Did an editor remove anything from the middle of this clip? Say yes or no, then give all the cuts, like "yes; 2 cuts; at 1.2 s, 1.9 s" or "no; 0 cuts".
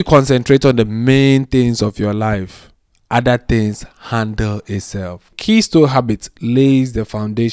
yes; 1 cut; at 5.4 s